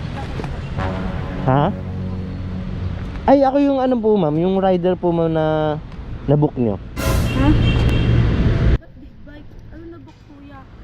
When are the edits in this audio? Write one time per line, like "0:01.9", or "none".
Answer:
0:08.8